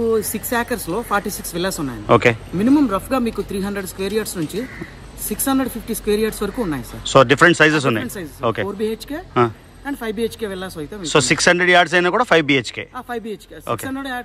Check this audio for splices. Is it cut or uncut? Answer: uncut